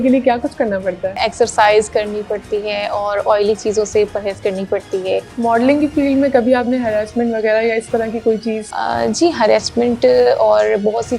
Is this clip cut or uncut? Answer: cut